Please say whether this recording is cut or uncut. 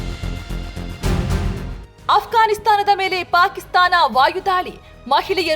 cut